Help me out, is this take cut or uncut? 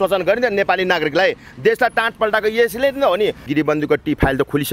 cut